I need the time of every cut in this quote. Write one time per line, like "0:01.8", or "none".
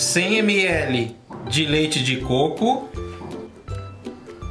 0:02.9